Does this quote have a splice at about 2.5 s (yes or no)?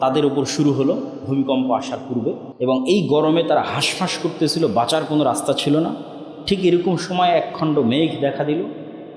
yes